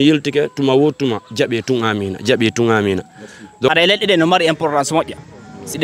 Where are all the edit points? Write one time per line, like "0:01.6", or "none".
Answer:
0:03.7